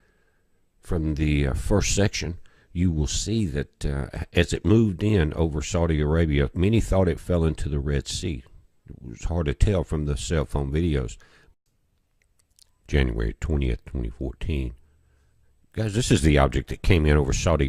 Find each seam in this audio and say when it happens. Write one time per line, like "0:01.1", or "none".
none